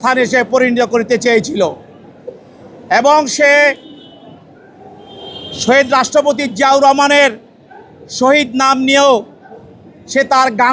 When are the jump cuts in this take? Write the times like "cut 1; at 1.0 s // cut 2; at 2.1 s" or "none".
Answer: none